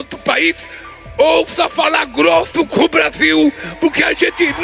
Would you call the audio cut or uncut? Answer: uncut